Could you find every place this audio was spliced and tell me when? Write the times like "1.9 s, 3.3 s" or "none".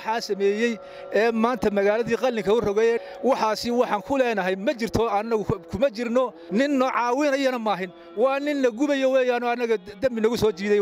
3.0 s, 6.4 s